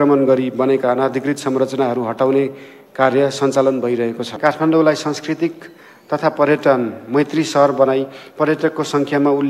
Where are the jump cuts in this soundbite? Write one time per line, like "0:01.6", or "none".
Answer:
0:04.3